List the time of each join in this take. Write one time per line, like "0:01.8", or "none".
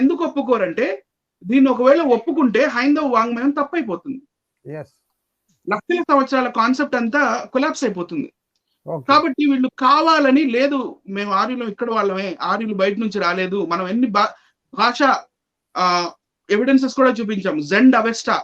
none